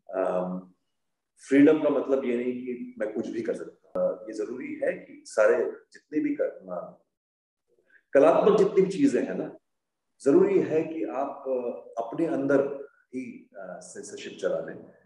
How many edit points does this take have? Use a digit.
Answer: 1